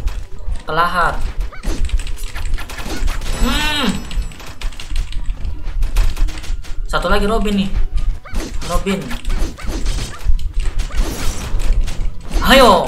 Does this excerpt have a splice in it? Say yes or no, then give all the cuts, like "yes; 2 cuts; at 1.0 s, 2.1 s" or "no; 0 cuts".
no; 0 cuts